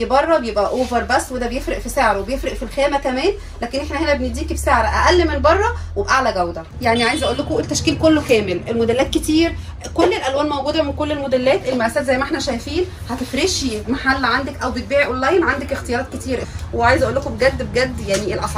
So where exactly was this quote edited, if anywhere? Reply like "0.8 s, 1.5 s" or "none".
6.6 s, 16.4 s